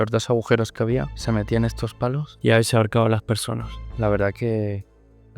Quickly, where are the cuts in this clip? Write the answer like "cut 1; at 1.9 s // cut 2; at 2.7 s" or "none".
cut 1; at 1.1 s // cut 2; at 2.3 s // cut 3; at 3.9 s